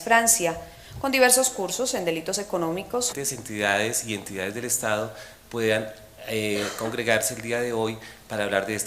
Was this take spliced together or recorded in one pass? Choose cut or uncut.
uncut